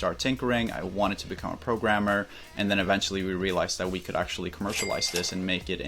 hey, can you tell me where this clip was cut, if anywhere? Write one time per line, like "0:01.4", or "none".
none